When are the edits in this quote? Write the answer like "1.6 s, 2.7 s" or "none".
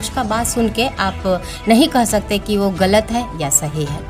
none

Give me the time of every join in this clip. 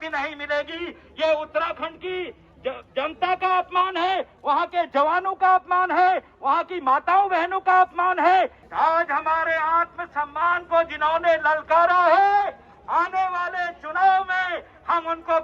8.6 s

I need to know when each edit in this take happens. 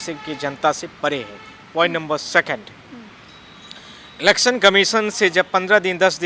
none

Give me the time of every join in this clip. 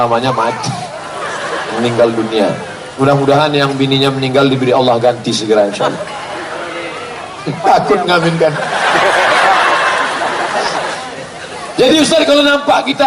11.0 s

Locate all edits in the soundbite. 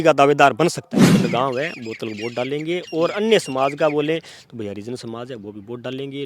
1.0 s

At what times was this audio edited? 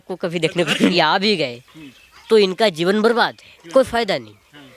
0.9 s

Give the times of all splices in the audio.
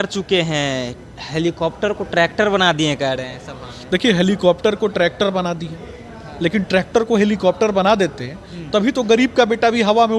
none

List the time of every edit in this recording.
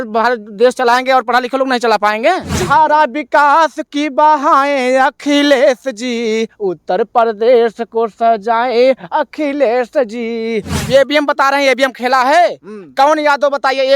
2.6 s, 10.8 s

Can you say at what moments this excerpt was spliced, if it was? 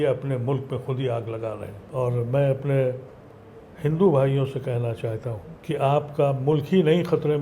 1.8 s, 5.5 s

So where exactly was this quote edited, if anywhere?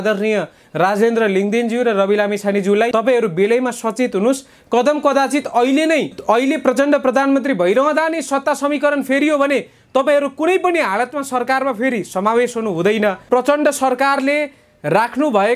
2.9 s, 6.2 s, 13.2 s

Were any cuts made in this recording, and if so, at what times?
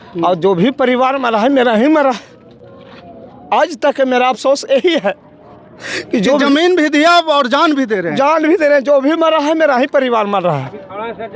none

